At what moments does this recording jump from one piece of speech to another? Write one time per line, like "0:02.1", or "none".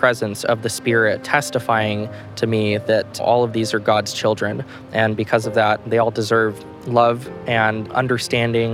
0:01.2
0:03.2